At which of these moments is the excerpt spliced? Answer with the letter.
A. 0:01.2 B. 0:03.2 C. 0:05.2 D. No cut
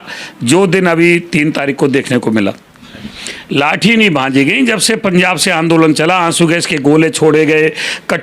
B